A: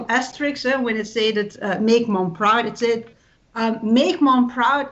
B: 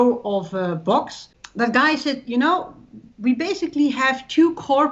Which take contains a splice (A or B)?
B